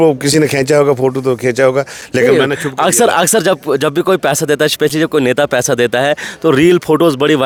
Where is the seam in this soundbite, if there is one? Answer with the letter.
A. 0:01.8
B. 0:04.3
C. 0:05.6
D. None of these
D